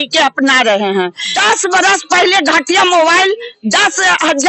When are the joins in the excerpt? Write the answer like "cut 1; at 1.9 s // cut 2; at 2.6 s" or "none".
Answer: cut 1; at 1.2 s